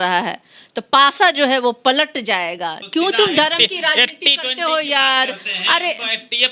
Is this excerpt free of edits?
no; 1 cut; at 2.7 s

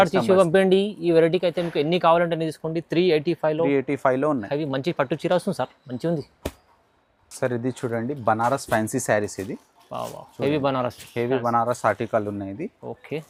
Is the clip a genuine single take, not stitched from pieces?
yes; 0 cuts

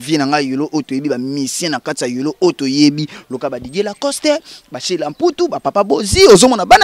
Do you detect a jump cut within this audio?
no; 0 cuts

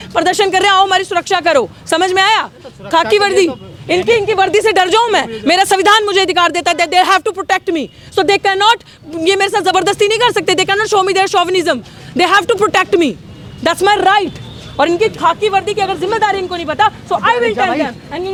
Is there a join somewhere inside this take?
no; 0 cuts

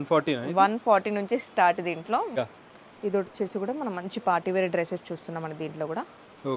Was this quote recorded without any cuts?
no; 1 cut; at 2.3 s

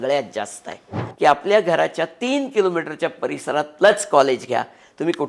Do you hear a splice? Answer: yes; 1 cut; at 1.0 s

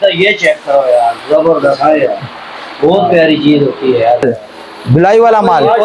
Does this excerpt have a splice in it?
yes; 1 cut; at 4.2 s

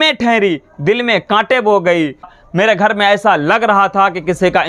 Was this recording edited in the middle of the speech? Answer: yes; 1 cut; at 2.3 s

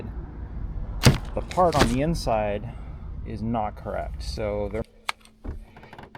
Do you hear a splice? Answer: yes; 1 cut; at 4.8 s

